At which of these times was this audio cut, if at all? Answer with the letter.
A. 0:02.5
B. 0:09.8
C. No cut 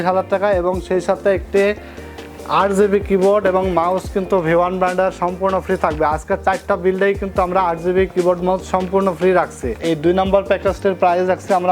B